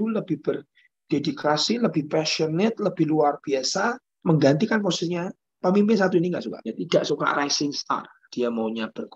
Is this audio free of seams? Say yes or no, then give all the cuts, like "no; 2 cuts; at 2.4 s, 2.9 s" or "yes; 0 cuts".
no; 3 cuts; at 4.1 s, 6.6 s, 8.2 s